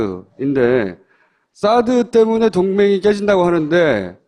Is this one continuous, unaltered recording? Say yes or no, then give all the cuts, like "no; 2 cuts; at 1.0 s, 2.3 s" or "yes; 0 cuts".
no; 1 cut; at 1.0 s